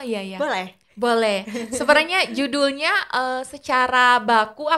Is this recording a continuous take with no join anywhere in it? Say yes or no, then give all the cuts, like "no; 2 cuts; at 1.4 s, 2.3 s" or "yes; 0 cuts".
yes; 0 cuts